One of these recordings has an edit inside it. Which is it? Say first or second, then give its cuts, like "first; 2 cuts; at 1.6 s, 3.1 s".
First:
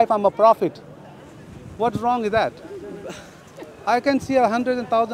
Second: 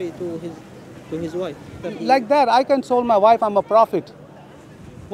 second; 1 cut; at 1.8 s